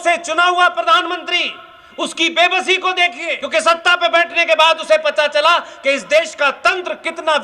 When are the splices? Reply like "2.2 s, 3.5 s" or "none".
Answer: 3.4 s